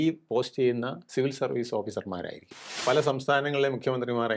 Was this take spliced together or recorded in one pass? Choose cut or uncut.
cut